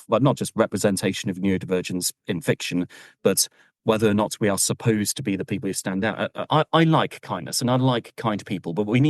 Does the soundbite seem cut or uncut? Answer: cut